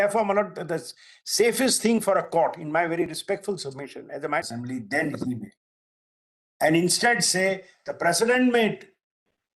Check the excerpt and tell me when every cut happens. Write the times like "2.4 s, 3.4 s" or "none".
4.5 s